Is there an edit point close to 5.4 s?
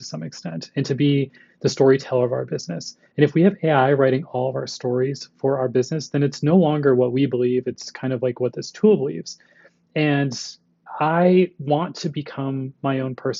no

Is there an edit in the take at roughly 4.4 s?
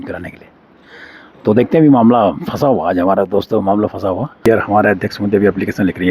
yes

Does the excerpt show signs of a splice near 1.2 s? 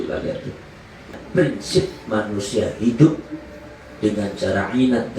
yes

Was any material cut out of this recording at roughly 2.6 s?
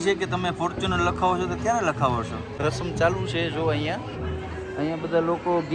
yes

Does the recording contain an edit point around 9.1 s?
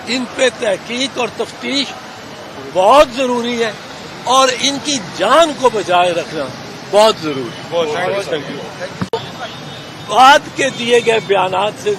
yes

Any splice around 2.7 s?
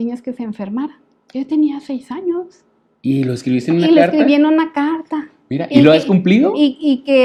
no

